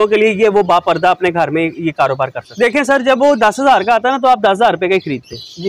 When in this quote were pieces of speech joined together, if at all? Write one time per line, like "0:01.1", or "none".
0:02.4